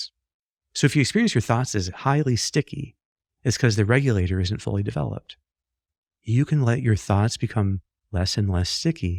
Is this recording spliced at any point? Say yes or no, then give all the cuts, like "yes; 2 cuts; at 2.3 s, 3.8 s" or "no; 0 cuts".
no; 0 cuts